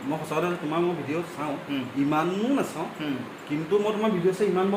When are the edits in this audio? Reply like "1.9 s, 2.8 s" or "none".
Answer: none